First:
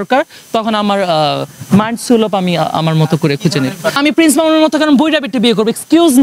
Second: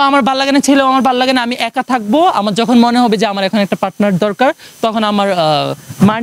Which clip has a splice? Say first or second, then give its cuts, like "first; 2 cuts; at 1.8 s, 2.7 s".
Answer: first; 1 cut; at 3.9 s